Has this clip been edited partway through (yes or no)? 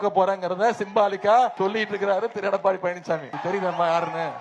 yes